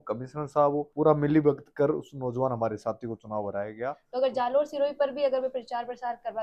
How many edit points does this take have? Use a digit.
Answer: 1